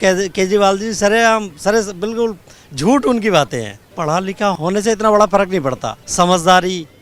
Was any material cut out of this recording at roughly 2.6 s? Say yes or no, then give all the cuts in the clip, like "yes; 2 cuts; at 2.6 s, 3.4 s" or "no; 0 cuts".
no; 3 cuts; at 3.9 s, 4.6 s, 6.0 s